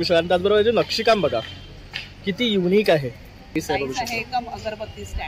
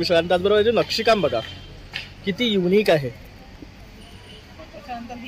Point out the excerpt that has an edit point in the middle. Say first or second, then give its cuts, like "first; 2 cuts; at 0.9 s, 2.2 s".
first; 1 cut; at 3.6 s